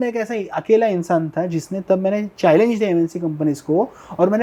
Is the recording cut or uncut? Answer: uncut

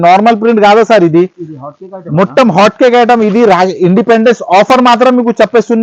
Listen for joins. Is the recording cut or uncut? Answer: uncut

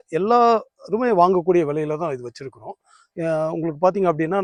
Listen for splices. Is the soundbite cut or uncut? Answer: uncut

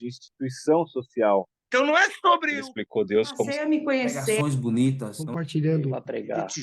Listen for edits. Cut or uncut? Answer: cut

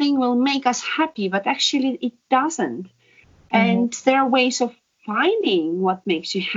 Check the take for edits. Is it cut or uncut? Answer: uncut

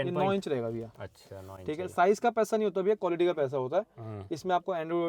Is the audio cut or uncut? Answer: uncut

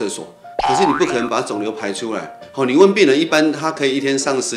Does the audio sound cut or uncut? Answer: cut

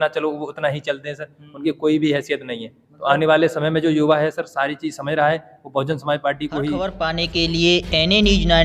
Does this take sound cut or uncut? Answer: cut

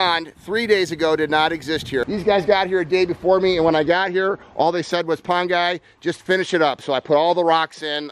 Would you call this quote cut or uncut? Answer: cut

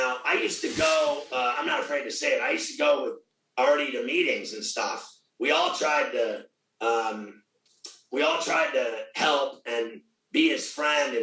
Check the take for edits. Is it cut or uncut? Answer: uncut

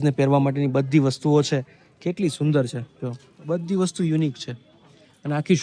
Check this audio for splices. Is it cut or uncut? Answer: uncut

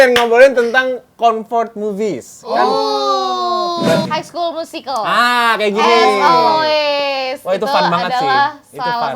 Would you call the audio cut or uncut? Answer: cut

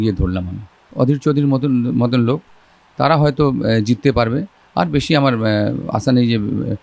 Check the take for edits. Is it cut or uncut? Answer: cut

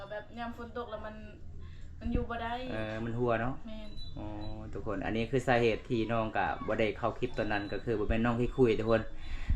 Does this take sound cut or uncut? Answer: uncut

